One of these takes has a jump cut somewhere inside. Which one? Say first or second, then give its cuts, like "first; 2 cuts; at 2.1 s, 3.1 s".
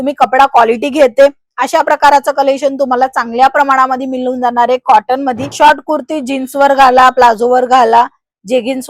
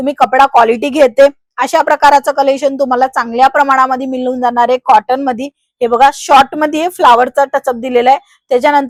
first; 1 cut; at 5.5 s